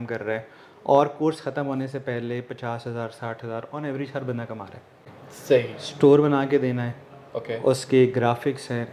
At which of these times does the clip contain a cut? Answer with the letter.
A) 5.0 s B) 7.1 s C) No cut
A